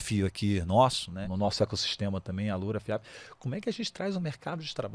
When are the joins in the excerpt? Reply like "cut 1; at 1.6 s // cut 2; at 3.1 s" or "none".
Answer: cut 1; at 1.2 s